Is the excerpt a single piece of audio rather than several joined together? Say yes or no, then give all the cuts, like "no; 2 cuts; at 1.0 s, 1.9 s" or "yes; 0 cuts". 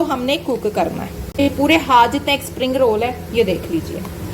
no; 1 cut; at 1.4 s